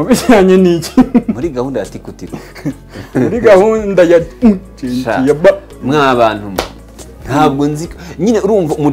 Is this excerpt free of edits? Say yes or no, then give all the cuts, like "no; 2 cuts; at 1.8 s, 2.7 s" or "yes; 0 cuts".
yes; 0 cuts